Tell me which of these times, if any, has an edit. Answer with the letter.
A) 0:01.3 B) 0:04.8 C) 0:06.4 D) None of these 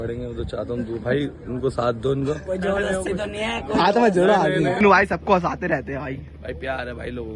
B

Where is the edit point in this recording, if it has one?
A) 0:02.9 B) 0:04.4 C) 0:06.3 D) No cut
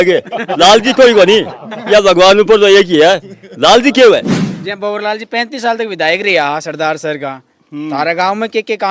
B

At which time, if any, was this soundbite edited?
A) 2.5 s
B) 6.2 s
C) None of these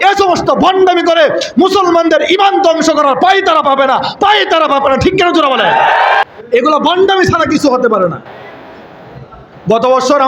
B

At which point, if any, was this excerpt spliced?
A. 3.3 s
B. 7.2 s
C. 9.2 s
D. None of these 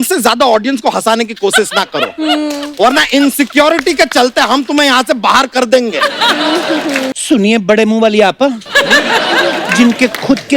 B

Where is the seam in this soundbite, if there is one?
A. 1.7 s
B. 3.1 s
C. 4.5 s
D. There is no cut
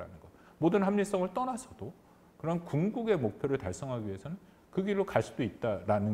D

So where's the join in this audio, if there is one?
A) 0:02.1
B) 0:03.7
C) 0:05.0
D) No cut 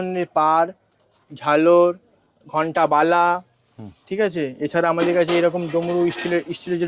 D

